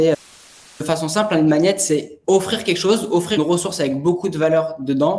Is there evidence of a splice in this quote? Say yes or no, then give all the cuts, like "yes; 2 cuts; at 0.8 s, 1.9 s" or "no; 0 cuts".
yes; 3 cuts; at 0.8 s, 2.1 s, 3.4 s